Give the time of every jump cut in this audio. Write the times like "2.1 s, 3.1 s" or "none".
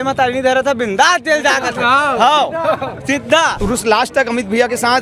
3.6 s